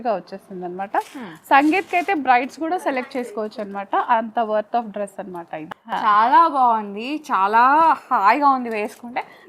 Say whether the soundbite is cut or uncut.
cut